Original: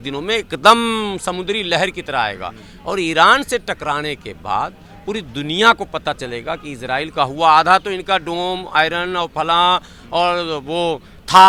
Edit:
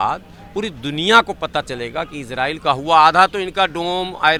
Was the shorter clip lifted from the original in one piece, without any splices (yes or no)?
yes